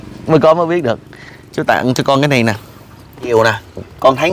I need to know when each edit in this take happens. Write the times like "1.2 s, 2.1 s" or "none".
3.3 s